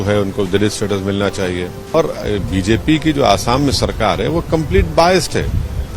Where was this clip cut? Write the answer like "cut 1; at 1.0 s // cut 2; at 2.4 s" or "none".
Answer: cut 1; at 1.8 s